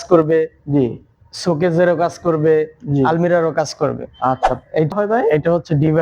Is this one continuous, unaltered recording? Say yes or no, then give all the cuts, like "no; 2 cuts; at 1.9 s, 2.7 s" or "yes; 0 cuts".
no; 1 cut; at 4.9 s